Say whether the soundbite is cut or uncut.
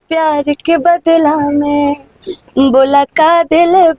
uncut